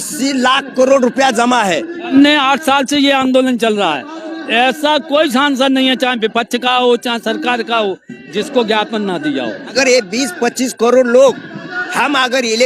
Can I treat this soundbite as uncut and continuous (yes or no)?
no